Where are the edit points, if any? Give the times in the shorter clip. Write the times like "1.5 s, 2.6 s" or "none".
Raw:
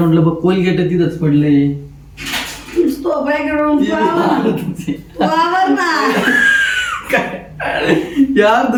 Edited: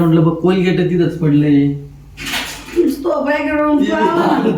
none